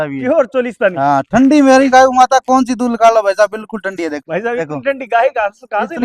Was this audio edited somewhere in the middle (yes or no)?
yes